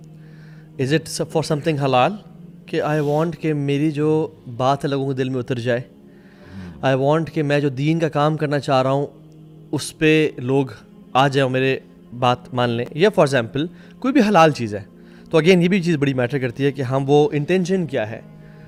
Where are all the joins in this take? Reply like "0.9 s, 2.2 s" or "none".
none